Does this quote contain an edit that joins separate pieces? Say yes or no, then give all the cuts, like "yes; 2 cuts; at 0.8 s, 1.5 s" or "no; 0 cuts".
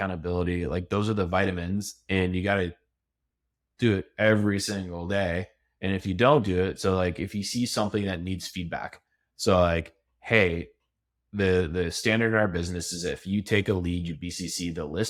no; 0 cuts